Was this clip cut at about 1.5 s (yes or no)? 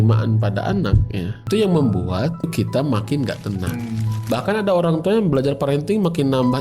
yes